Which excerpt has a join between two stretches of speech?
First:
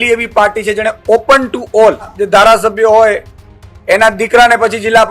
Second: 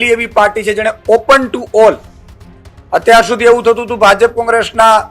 first; 1 cut; at 2.2 s

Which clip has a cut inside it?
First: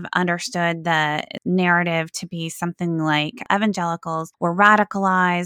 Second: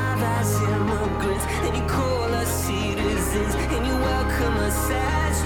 first; 3 cuts; at 1.3 s, 3.4 s, 4.3 s

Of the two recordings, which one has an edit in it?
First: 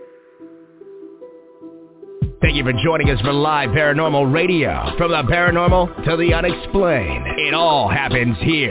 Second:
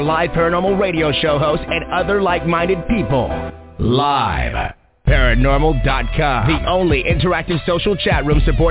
first; 1 cut; at 1.0 s

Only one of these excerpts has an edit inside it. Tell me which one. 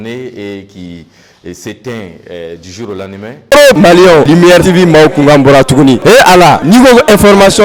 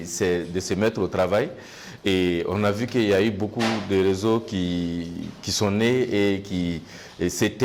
first; 1 cut; at 3.4 s

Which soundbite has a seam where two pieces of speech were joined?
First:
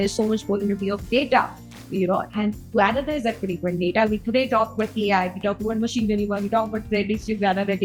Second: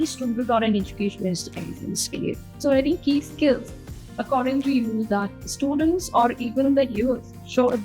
second; 1 cut; at 2.5 s

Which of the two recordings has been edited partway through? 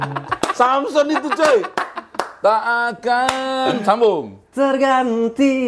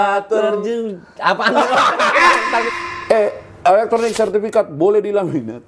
second; 1 cut; at 2.7 s

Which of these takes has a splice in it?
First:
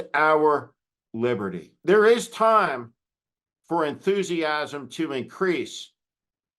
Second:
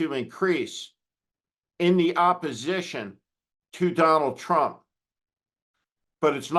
first; 1 cut; at 1.7 s

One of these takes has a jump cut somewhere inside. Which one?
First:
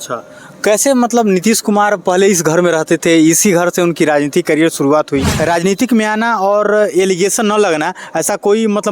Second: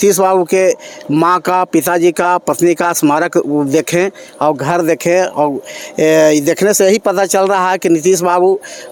first; 1 cut; at 5.3 s

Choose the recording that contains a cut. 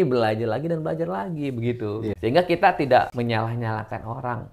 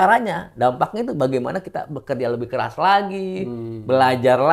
first; 2 cuts; at 2.2 s, 3.1 s

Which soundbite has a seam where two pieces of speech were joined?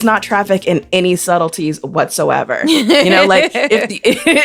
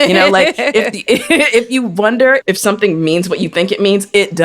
second; 1 cut; at 2.4 s

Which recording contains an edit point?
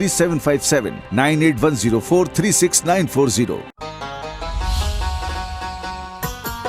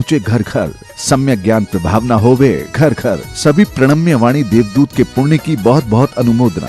first; 1 cut; at 3.7 s

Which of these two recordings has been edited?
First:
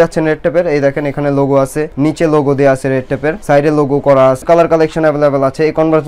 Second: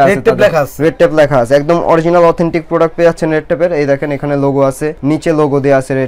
first; 1 cut; at 4.4 s

